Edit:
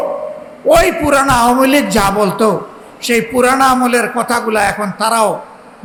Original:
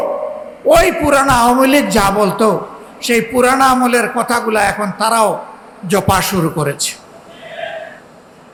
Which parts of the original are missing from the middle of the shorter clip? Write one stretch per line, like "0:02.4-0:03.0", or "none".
none